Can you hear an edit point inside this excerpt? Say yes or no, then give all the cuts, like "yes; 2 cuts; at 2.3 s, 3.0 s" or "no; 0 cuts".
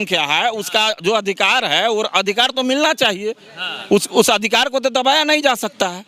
no; 0 cuts